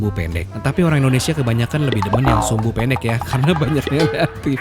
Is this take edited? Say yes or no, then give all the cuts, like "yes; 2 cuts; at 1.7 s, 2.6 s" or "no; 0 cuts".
no; 0 cuts